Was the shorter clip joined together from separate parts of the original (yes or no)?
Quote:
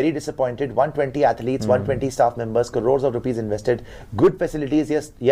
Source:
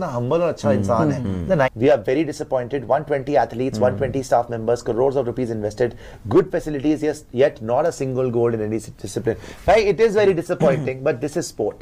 no